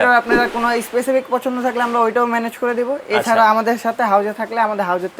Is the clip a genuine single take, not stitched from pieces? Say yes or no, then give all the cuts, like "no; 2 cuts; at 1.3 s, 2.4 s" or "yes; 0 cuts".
yes; 0 cuts